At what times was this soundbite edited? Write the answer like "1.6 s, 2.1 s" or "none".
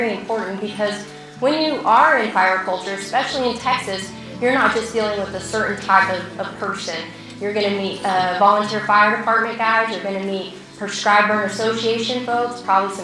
none